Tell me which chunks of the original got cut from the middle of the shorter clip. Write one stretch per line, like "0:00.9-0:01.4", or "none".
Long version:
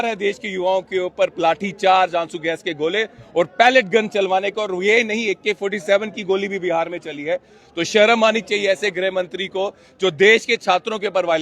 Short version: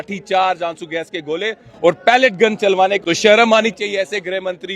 0:04.5-0:07.7

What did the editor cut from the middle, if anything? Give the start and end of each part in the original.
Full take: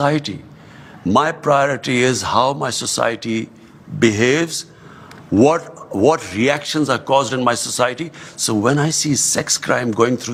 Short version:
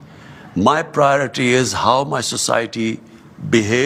none

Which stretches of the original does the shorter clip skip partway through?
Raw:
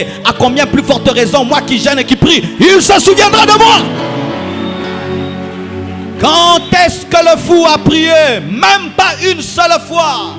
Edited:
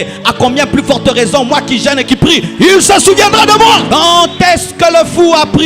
0:03.8-0:06.2

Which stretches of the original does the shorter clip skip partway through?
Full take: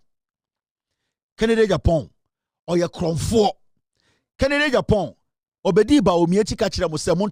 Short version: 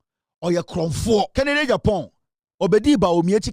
0:03.6-0:04.3

